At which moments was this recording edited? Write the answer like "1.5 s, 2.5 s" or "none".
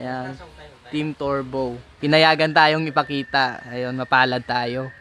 1.9 s